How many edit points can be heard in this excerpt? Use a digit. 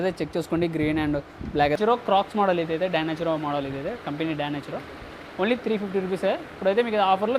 1